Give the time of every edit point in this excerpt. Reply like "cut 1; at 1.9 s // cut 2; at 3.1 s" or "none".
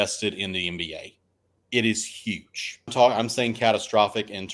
cut 1; at 2.9 s